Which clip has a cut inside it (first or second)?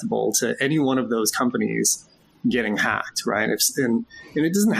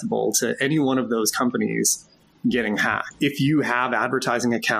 second